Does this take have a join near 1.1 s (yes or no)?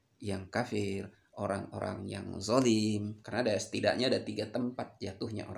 no